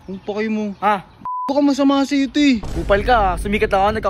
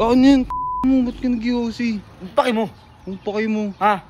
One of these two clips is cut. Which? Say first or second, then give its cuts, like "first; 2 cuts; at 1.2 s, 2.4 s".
first; 1 cut; at 2.7 s